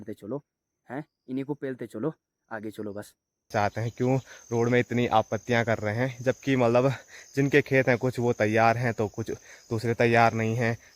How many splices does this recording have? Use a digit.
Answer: 1